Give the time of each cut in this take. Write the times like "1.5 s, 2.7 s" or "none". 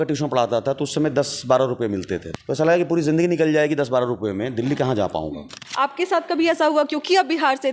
2.3 s, 5.6 s